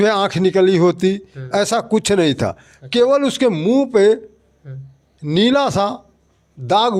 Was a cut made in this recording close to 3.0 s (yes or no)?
no